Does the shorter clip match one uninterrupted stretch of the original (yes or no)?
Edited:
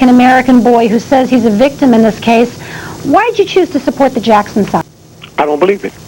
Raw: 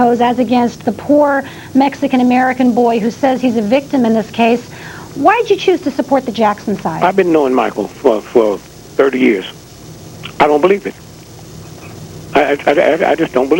no